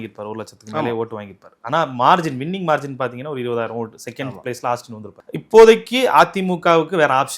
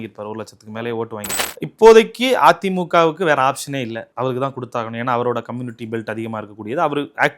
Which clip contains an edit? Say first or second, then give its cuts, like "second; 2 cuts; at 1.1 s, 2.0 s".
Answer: second; 1 cut; at 1.4 s